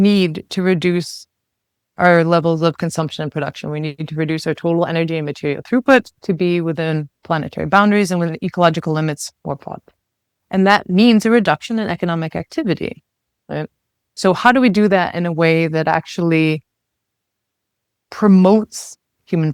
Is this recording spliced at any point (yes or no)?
no